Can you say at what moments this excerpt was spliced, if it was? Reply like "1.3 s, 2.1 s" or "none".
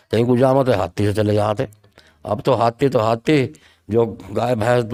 none